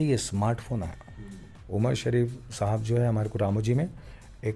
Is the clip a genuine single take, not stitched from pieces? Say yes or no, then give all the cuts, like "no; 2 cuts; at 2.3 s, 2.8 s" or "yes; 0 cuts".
no; 1 cut; at 1.5 s